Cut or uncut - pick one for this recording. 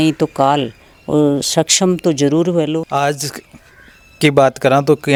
uncut